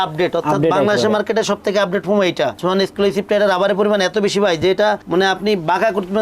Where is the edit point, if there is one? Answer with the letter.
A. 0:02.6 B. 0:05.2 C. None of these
A